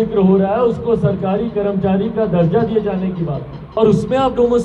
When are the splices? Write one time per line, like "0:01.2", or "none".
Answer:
0:03.5